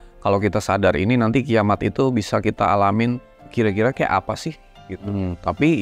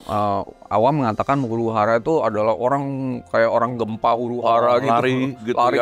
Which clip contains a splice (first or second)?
first